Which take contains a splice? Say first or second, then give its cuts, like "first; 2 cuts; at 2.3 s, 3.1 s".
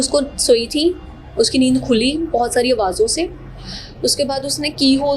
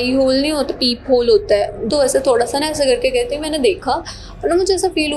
second; 1 cut; at 1.8 s